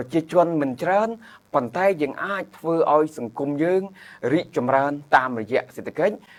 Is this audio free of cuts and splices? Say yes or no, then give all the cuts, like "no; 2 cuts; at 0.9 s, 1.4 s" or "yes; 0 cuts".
yes; 0 cuts